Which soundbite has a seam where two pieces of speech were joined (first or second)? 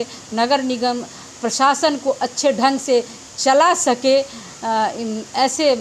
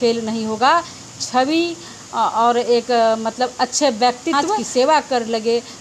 second